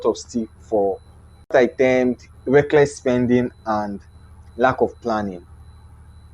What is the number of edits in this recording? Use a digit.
1